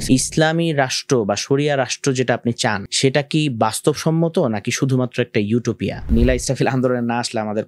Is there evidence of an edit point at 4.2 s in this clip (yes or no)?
no